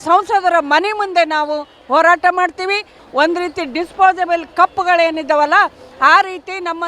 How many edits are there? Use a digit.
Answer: 1